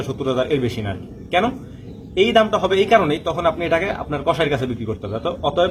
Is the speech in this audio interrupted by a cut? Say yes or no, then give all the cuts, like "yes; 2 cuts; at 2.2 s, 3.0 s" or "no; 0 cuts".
no; 0 cuts